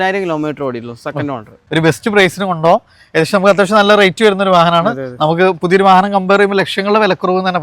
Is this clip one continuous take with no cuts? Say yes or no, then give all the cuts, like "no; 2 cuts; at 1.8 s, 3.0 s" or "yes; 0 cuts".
no; 1 cut; at 1.6 s